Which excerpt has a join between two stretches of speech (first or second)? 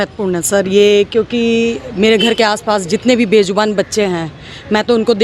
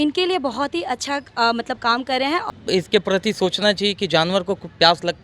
second